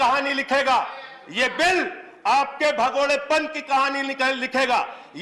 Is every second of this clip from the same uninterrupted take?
yes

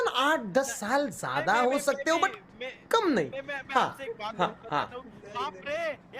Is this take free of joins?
yes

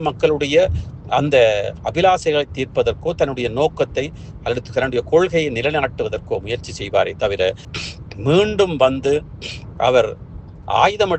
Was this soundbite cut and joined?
no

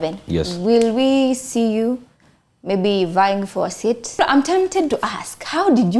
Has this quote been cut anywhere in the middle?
yes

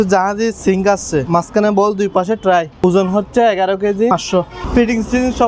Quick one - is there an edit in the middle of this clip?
yes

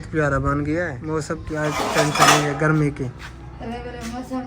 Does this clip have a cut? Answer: yes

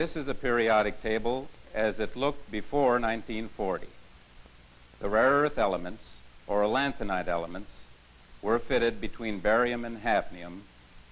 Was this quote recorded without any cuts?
yes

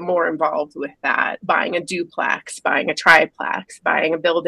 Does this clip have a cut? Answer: yes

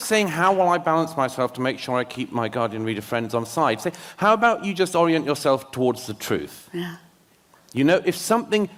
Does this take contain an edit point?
no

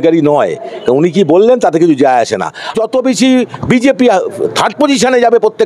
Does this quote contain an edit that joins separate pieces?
yes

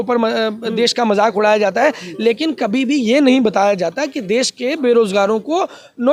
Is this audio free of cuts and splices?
yes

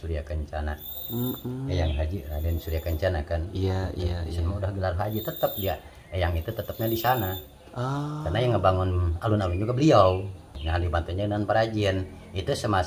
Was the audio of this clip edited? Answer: yes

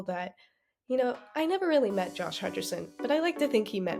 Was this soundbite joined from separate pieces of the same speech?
no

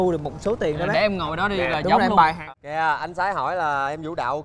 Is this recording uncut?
no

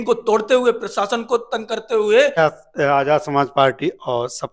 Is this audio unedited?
no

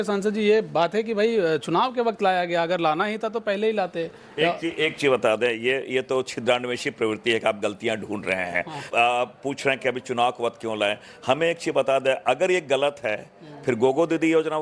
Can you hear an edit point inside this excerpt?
no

